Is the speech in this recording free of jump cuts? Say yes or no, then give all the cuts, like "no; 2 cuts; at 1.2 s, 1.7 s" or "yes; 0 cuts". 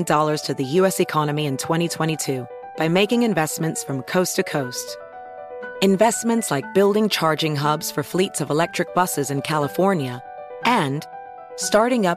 yes; 0 cuts